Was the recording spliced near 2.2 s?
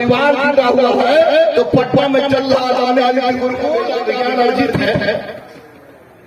no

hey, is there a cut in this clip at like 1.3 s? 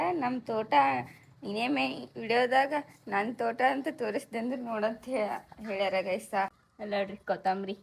no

